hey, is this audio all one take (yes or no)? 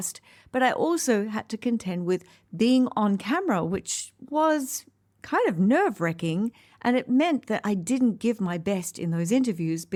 yes